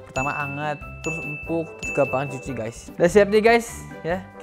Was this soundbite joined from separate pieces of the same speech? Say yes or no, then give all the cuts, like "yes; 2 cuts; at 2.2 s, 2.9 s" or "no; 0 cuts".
yes; 1 cut; at 2.8 s